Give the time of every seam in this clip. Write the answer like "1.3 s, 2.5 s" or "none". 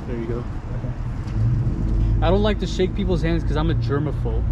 none